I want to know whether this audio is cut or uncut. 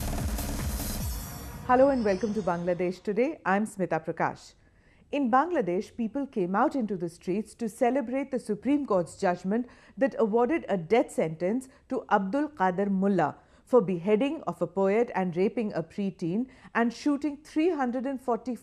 cut